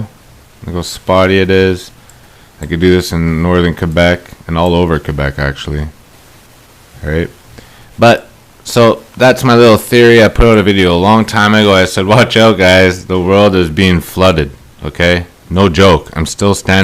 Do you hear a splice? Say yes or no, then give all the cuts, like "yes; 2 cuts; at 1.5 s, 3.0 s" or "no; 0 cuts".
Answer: yes; 1 cut; at 8.5 s